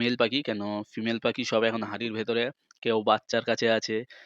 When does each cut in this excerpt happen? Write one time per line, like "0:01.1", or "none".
none